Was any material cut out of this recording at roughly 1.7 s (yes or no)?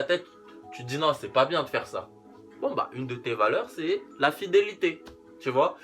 no